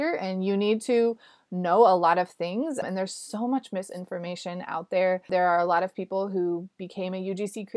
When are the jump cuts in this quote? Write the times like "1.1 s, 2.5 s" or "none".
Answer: 2.8 s, 5.2 s